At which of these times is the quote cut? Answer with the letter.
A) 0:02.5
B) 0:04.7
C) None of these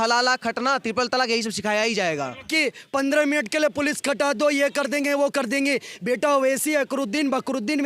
A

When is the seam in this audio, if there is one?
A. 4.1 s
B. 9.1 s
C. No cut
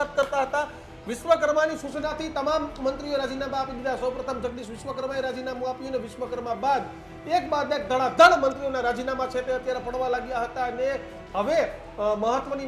C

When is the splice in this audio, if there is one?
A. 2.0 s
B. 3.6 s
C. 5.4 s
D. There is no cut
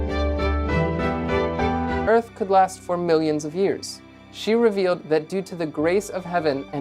A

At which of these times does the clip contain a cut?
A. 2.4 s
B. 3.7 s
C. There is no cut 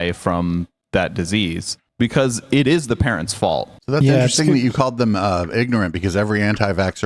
B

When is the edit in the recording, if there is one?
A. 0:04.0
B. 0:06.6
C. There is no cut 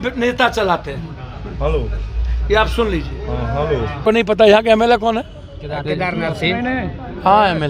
A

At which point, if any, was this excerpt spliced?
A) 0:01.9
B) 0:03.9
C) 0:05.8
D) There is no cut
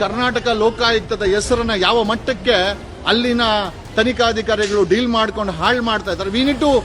D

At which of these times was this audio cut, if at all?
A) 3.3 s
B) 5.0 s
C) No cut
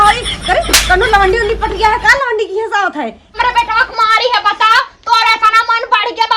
A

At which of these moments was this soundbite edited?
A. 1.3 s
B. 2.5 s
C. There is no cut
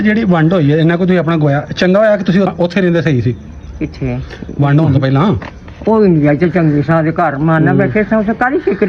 B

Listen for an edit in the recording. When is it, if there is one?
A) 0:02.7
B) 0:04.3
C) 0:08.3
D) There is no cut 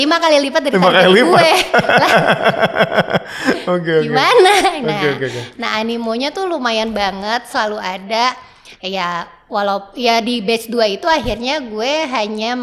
D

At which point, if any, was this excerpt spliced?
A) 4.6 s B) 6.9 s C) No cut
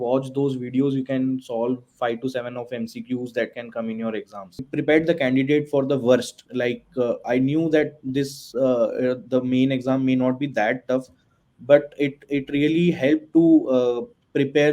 A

